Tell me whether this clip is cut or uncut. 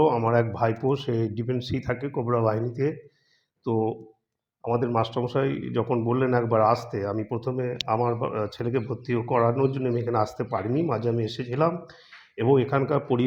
uncut